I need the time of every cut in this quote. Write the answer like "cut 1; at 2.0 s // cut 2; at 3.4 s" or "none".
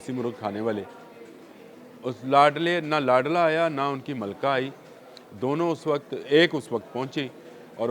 none